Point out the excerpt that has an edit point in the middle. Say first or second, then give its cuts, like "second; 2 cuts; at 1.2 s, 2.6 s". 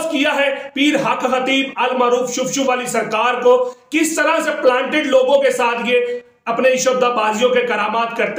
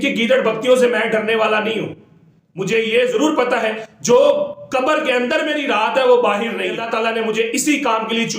second; 1 cut; at 6.8 s